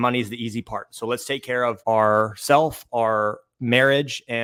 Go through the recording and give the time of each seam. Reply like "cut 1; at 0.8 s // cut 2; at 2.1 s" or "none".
none